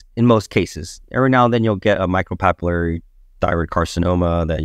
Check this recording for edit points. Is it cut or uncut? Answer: uncut